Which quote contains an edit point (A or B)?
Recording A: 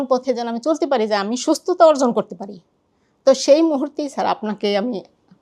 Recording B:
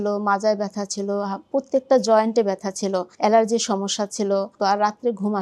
B